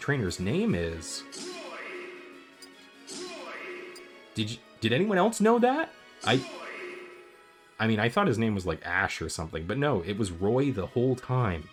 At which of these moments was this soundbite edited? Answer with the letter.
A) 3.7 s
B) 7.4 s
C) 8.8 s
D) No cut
D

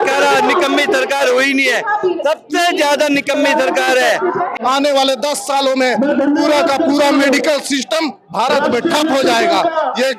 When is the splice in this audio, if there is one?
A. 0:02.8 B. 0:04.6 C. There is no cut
B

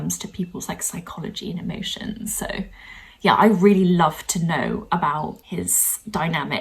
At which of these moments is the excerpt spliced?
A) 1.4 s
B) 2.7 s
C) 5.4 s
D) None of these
C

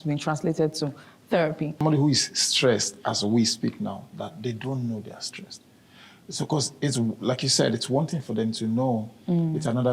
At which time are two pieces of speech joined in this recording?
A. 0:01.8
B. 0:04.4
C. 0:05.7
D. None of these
A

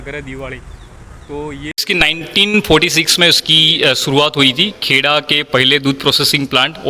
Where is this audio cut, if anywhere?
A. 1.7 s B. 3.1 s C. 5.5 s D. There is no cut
A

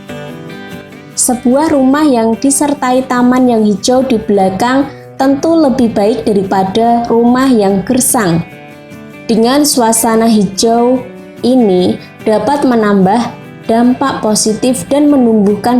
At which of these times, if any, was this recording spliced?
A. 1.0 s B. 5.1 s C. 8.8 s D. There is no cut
A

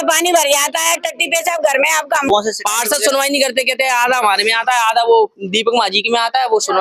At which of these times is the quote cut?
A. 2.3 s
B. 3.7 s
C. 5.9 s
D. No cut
A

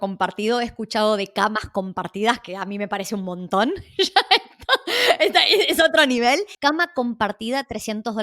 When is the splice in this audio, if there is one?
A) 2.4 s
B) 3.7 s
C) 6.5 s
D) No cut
C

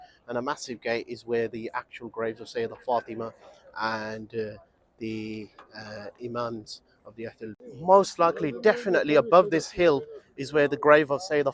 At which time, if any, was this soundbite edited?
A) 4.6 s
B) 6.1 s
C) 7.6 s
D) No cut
C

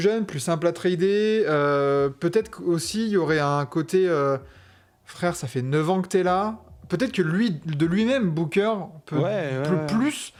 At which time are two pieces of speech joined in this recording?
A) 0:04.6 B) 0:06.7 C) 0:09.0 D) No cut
D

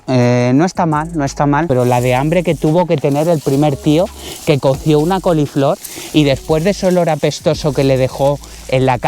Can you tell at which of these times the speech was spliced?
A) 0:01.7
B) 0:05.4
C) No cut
A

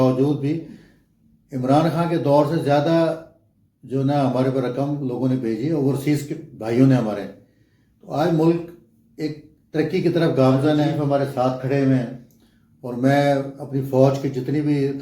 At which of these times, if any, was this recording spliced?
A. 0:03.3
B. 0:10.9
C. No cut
B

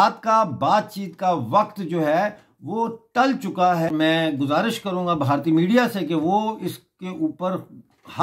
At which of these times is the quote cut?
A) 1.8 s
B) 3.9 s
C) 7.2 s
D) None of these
B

